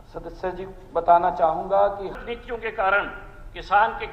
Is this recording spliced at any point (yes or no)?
yes